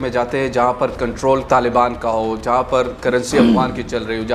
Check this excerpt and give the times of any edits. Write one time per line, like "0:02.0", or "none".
0:01.4

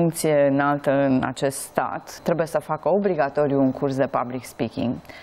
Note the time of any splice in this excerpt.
0:02.2

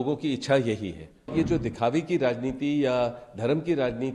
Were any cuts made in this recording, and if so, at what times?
0:01.3

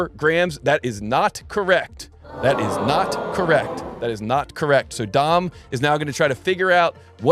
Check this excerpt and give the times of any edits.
0:03.9

